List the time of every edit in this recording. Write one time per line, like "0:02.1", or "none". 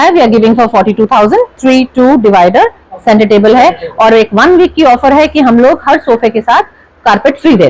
none